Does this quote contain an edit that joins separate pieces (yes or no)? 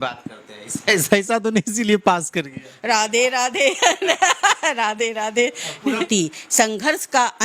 yes